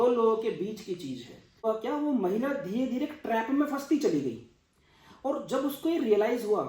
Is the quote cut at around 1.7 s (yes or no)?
yes